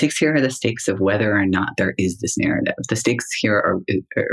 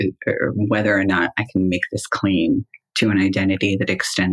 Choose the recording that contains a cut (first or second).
second